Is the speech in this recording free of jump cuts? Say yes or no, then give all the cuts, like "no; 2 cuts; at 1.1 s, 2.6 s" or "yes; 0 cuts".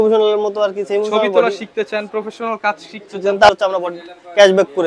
no; 1 cut; at 3.5 s